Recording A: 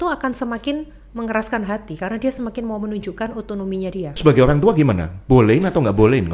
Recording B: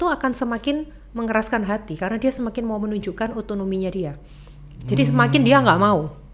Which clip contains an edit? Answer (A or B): A